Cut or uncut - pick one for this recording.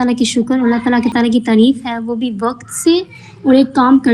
cut